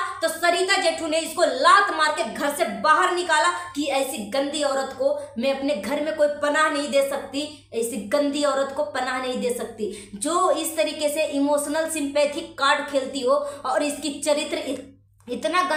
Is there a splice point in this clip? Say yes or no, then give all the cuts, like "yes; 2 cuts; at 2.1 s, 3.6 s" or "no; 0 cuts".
no; 0 cuts